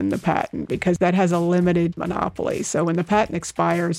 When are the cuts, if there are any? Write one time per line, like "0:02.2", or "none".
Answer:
0:01.9